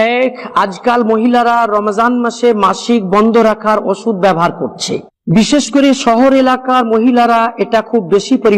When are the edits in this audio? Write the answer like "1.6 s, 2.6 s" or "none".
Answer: 5.5 s